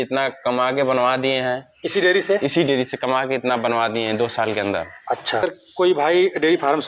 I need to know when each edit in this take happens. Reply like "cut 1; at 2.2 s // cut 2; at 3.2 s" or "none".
cut 1; at 5.4 s